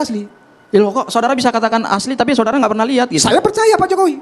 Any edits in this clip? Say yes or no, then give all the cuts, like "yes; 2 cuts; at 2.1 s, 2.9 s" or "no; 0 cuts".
yes; 1 cut; at 3.2 s